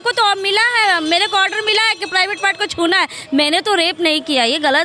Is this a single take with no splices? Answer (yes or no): yes